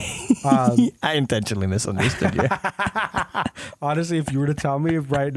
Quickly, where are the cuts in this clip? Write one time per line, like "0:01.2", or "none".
none